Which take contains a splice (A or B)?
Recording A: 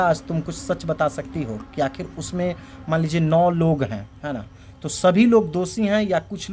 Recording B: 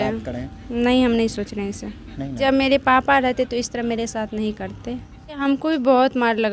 B